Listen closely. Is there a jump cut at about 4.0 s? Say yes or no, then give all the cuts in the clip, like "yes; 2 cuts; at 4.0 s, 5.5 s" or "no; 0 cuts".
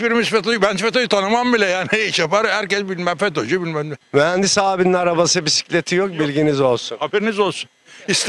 yes; 1 cut; at 4.0 s